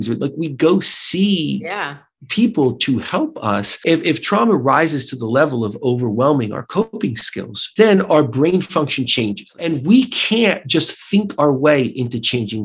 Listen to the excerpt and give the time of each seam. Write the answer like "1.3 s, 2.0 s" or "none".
3.7 s, 7.6 s, 9.7 s